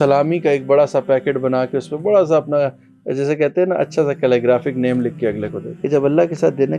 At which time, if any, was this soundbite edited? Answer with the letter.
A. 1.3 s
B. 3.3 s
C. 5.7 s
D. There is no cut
C